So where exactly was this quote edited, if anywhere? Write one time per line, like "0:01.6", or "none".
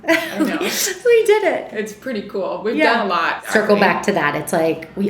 0:03.4